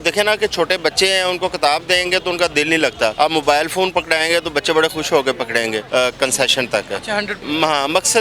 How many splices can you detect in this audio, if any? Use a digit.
3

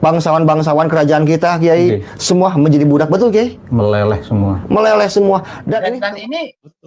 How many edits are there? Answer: 1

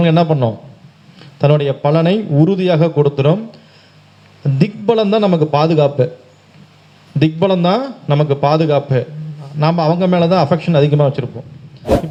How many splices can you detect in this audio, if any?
0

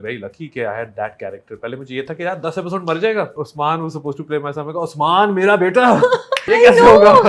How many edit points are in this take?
2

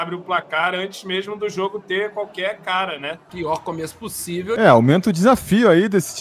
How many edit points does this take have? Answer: 2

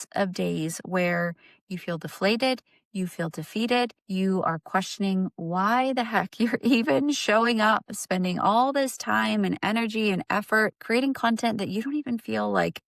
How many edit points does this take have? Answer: 1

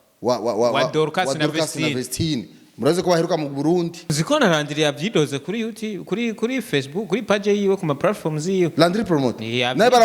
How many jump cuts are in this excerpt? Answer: 1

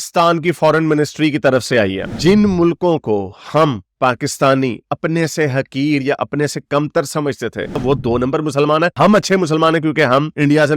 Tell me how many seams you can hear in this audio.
2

